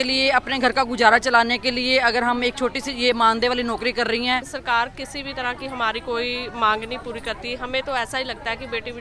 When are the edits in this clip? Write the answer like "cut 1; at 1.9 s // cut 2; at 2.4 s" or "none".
cut 1; at 4.5 s